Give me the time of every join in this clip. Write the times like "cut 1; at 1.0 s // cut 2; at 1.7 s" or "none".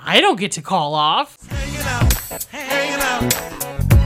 cut 1; at 1.3 s